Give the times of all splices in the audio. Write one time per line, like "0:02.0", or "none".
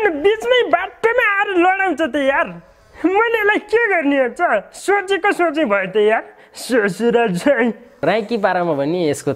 0:08.0